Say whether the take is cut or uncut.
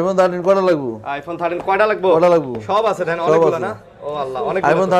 uncut